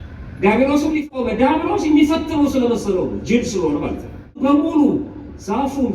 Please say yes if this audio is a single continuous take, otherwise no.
no